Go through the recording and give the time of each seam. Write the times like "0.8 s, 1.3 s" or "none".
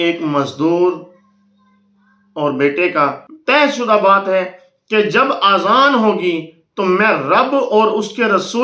3.3 s